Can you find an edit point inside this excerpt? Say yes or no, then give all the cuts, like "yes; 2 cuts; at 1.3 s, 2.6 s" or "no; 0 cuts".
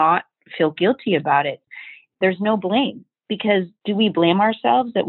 yes; 1 cut; at 2.1 s